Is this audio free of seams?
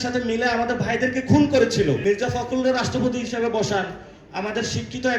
no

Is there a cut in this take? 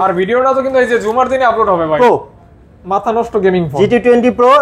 yes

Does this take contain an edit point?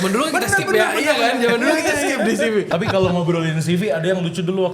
yes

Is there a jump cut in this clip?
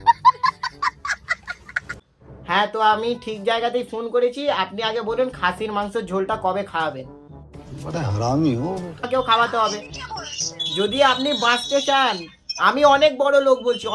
yes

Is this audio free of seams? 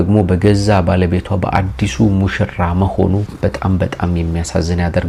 yes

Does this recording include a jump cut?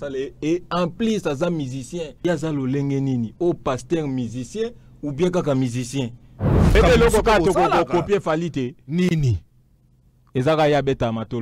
yes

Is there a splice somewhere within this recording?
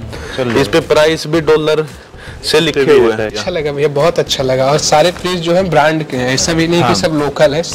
yes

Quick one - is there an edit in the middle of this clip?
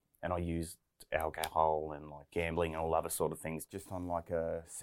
yes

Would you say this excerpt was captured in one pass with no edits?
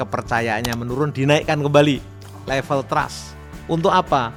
yes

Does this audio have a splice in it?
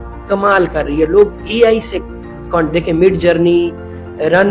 no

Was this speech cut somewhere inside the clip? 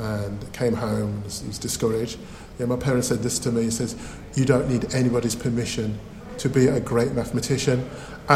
no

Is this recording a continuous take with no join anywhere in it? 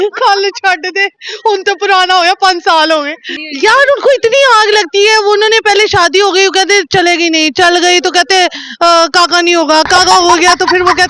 no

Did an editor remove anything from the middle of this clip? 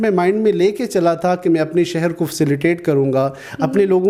no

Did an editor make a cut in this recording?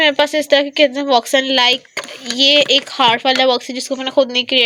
no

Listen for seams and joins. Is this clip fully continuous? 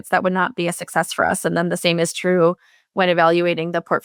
yes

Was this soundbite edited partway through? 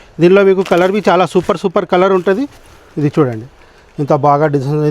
yes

